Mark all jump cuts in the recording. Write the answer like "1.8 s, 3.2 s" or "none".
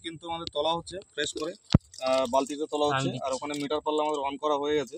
none